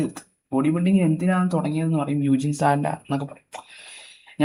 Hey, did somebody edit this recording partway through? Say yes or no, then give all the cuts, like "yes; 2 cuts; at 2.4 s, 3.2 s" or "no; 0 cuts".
no; 0 cuts